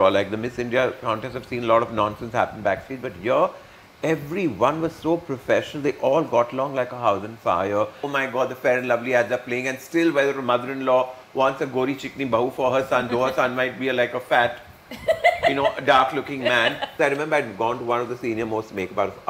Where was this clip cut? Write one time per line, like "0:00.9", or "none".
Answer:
0:08.0
0:16.9